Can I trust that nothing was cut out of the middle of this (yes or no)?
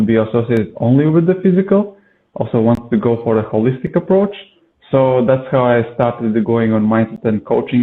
yes